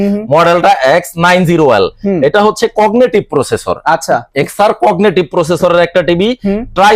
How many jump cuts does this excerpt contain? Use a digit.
0